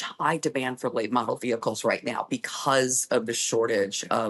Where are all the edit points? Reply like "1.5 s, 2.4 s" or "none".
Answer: none